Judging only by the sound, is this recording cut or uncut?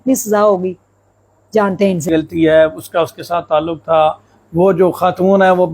cut